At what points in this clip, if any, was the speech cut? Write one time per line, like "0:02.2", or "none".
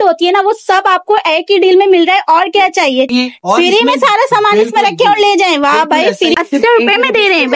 0:03.1
0:06.4